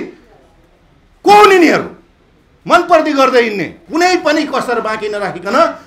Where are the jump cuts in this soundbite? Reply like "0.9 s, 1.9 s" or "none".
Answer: 3.7 s